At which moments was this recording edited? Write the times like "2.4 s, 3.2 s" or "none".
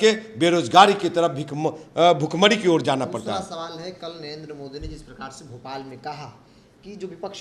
none